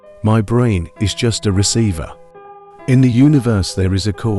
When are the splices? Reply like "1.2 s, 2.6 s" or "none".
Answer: none